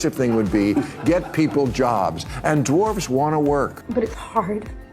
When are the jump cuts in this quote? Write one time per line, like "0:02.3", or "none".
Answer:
0:03.8